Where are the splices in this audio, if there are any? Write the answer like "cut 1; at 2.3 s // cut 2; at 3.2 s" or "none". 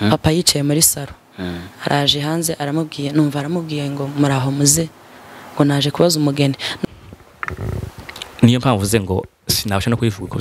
cut 1; at 6.8 s